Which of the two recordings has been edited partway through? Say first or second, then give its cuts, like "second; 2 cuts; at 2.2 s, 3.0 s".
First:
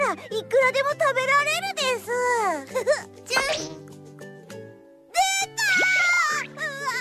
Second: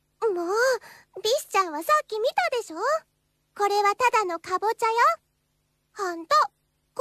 second; 1 cut; at 2.1 s